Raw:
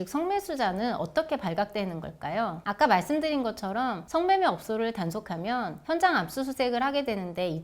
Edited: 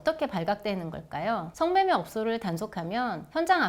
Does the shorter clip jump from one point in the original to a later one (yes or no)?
yes